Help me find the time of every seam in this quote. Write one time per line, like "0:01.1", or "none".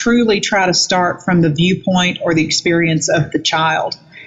none